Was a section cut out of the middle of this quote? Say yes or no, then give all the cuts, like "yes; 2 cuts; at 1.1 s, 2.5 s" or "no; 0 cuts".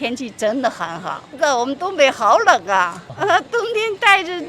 yes; 2 cuts; at 1.3 s, 3.0 s